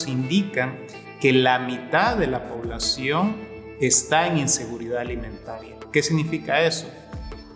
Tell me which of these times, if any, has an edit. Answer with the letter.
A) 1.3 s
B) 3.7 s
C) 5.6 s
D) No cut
D